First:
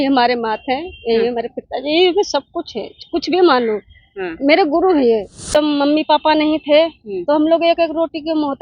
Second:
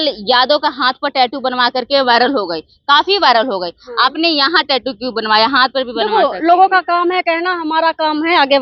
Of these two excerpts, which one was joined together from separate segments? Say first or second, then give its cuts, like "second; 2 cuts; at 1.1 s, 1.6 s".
first; 1 cut; at 5.4 s